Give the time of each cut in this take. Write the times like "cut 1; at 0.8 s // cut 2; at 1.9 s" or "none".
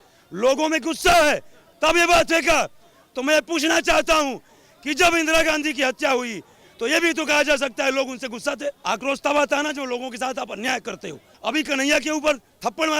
cut 1; at 8.8 s // cut 2; at 11.4 s